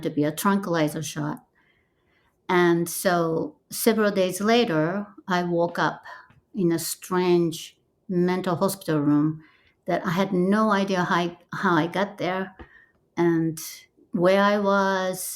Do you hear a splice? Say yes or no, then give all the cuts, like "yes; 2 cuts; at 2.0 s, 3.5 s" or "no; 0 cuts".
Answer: yes; 1 cut; at 14.0 s